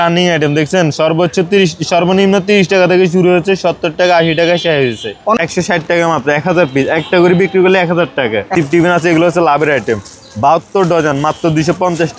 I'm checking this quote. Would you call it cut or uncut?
cut